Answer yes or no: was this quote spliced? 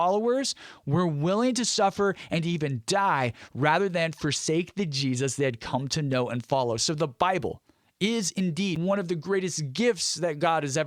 yes